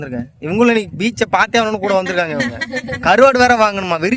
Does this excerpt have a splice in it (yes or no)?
no